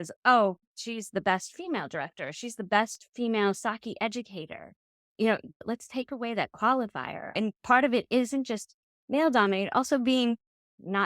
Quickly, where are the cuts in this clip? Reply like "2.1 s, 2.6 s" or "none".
5.6 s, 7.4 s